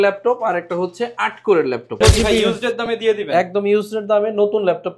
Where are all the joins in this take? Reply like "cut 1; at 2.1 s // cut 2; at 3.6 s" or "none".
cut 1; at 2.0 s